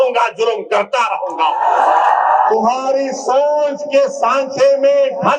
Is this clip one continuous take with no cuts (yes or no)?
no